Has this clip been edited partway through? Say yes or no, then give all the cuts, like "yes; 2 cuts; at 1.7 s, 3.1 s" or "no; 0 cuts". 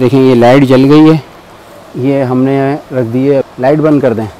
no; 0 cuts